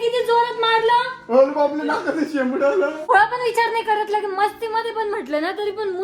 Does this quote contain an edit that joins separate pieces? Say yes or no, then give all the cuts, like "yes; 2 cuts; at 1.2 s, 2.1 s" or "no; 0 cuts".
yes; 1 cut; at 3.1 s